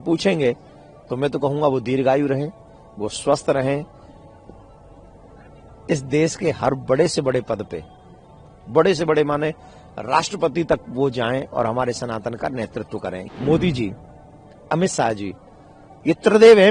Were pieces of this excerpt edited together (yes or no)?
yes